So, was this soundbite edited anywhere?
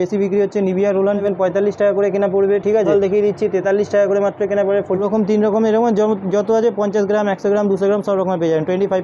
yes; 3 cuts; at 1.2 s, 2.9 s, 5.0 s

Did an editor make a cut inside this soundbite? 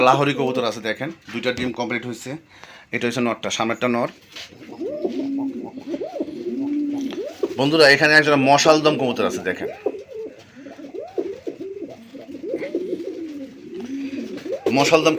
yes; 1 cut; at 4.3 s

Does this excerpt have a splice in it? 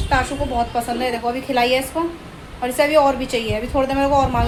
no; 0 cuts

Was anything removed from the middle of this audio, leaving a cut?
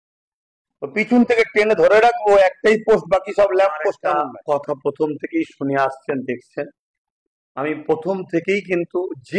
yes; 1 cut; at 4.0 s

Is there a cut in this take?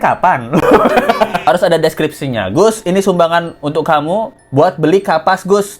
yes; 1 cut; at 1.4 s

